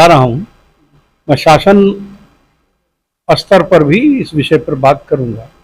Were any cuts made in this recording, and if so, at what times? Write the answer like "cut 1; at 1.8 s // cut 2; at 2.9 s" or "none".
none